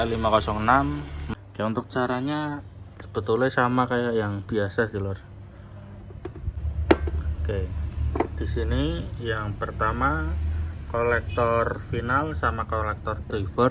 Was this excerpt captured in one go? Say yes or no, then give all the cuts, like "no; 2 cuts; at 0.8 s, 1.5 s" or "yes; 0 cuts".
no; 2 cuts; at 1.1 s, 6.6 s